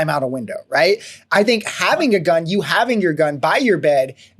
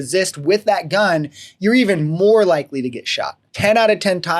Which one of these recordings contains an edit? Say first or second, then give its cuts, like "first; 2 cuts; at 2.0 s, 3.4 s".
second; 1 cut; at 3.5 s